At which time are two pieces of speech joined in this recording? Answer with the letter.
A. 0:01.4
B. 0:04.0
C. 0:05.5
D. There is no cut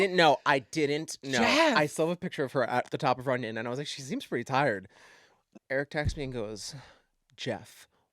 C